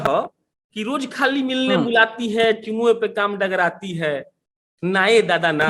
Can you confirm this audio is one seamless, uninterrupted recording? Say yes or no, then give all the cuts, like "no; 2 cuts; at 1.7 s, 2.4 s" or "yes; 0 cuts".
yes; 0 cuts